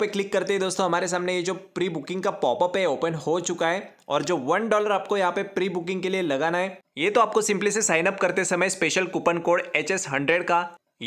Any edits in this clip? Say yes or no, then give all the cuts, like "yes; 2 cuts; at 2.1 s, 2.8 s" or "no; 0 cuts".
no; 0 cuts